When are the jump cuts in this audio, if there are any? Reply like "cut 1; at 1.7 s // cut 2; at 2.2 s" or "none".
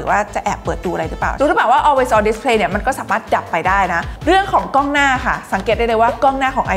cut 1; at 1.3 s // cut 2; at 4.1 s